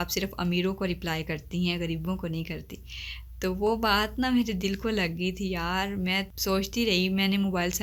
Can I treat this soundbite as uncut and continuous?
yes; 0 cuts

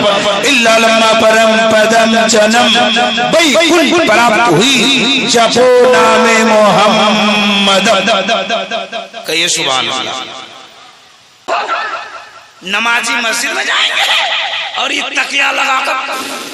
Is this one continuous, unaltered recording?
no; 1 cut; at 11.5 s

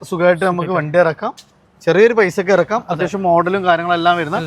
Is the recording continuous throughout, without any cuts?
yes; 0 cuts

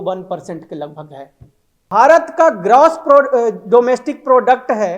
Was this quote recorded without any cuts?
no; 1 cut; at 1.8 s

